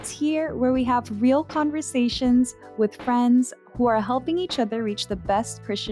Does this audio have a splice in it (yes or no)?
no